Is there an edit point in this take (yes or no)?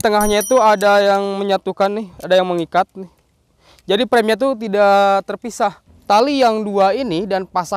yes